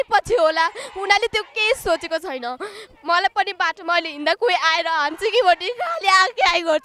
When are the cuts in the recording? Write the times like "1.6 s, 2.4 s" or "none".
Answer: none